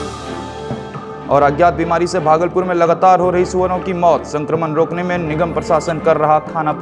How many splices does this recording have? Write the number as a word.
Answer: zero